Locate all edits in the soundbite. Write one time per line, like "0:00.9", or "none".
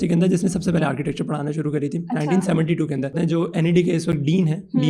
0:03.1